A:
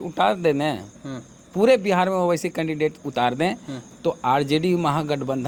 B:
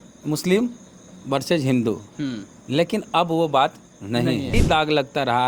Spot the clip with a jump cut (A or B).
B